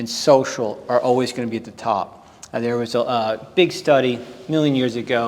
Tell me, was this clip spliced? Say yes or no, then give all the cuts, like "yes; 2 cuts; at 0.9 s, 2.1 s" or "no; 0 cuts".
no; 0 cuts